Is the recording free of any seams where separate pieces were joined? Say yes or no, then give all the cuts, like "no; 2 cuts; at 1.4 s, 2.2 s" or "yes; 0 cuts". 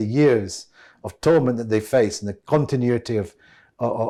yes; 0 cuts